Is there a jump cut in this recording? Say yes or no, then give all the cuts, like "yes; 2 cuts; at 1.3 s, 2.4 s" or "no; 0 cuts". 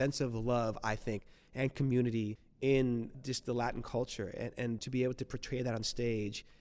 no; 0 cuts